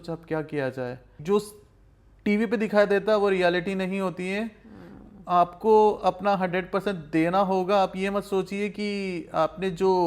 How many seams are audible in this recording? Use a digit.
1